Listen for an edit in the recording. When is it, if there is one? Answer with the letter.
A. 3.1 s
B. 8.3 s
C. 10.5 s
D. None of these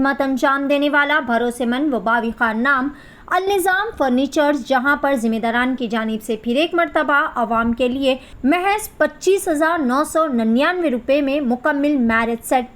B